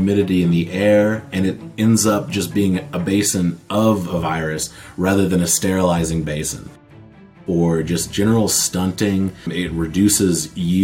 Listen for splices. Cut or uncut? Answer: cut